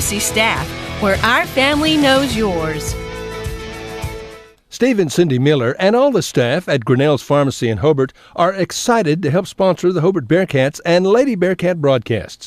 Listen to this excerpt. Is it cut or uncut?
cut